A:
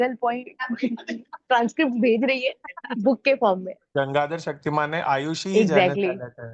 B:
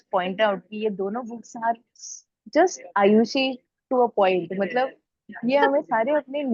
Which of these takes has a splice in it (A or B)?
A